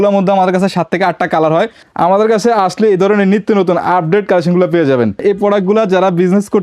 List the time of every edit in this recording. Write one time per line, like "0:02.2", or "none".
0:01.8
0:05.2